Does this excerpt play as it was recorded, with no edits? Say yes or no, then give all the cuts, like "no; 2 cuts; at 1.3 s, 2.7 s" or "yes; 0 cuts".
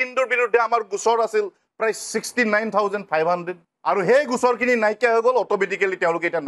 yes; 0 cuts